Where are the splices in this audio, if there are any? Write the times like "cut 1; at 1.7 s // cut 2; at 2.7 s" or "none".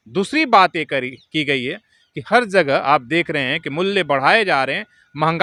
none

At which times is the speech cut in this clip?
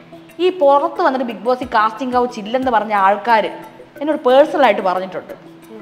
none

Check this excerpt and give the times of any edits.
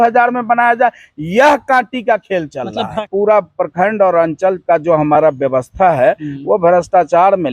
cut 1; at 3.1 s

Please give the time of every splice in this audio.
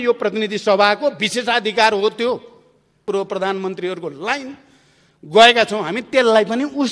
cut 1; at 3.0 s

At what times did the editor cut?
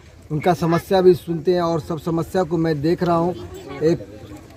none

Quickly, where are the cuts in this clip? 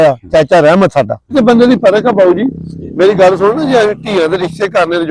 cut 1; at 1.3 s

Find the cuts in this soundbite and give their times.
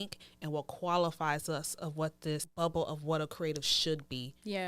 cut 1; at 2.5 s

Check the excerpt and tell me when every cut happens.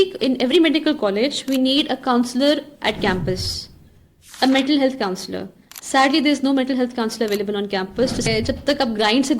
cut 1; at 8.3 s

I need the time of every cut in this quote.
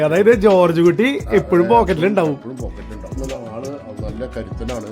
cut 1; at 3.2 s

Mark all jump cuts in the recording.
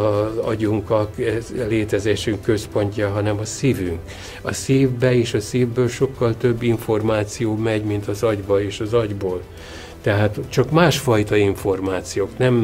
none

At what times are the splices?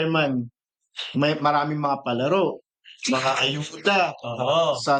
none

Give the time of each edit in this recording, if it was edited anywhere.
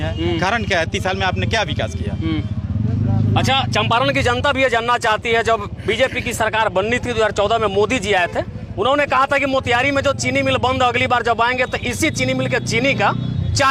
none

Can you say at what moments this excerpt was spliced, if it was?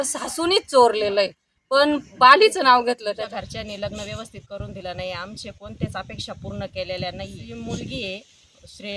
cut 1; at 3.1 s // cut 2; at 7.4 s

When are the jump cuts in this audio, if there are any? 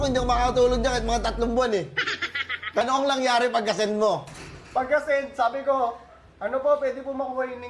cut 1; at 2.8 s

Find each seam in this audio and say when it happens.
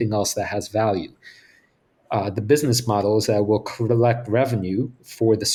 none

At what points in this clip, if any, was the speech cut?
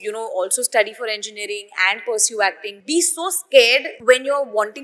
cut 1; at 2.7 s // cut 2; at 3.9 s

